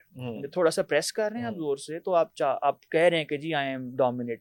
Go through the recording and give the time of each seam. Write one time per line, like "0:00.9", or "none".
none